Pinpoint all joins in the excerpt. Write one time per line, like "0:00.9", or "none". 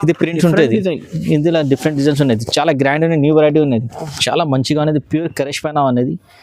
0:04.2